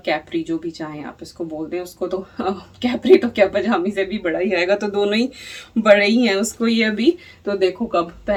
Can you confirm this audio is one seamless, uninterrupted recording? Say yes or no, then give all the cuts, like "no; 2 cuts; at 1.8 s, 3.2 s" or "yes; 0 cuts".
yes; 0 cuts